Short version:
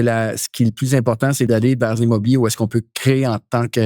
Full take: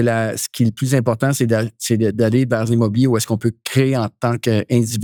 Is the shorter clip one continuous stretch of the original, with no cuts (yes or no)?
no